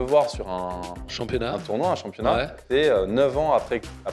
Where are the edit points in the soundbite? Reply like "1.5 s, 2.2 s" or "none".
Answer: 2.6 s